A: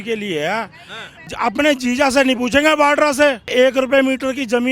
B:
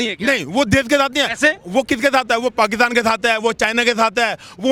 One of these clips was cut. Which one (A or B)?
A